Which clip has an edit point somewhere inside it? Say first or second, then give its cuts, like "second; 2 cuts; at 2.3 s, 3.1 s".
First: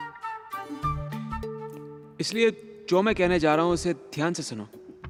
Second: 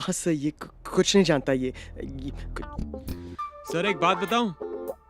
second; 1 cut; at 2.6 s